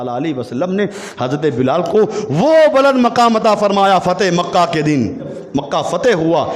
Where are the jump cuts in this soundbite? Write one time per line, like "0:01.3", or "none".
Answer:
0:05.4